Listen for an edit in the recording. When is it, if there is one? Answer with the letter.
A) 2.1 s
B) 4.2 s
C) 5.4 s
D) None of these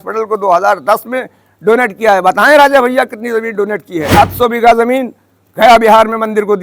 B